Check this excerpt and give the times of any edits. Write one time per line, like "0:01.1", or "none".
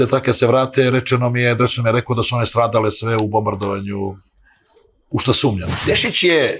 0:05.7